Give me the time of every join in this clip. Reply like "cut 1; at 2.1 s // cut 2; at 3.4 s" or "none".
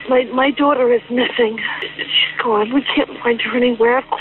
cut 1; at 1.7 s